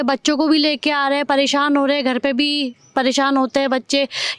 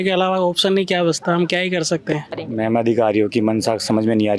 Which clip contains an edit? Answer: second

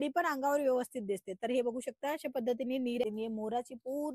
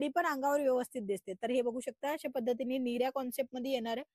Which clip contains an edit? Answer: first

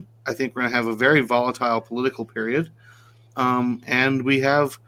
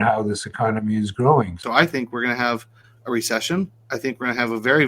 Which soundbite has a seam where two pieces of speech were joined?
second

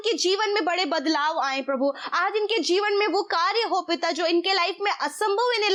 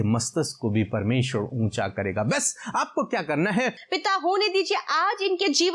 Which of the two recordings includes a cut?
second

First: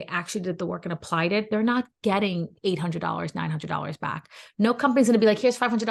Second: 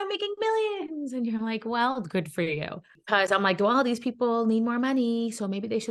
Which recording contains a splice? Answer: second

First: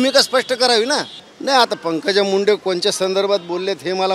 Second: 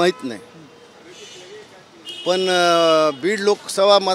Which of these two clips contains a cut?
first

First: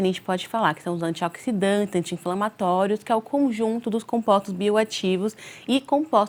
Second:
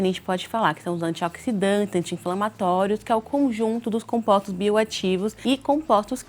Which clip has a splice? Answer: second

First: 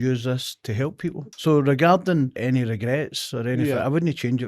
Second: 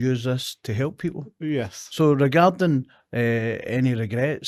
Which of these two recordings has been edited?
first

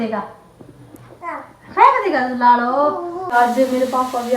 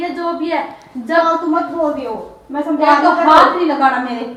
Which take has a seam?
first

